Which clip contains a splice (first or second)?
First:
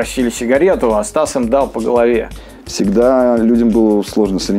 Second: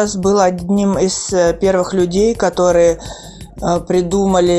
first